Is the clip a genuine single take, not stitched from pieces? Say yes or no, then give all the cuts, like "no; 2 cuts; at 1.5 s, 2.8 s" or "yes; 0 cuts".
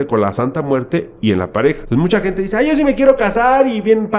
no; 1 cut; at 1.8 s